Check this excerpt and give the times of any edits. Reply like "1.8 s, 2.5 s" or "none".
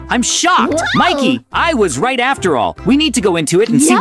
none